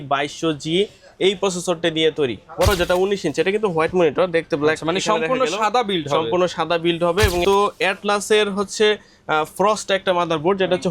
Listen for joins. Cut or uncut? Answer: cut